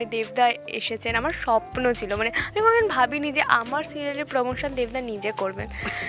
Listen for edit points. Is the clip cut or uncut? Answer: uncut